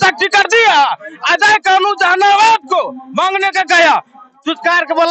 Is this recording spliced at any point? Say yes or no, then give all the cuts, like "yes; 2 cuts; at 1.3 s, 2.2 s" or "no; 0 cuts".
no; 0 cuts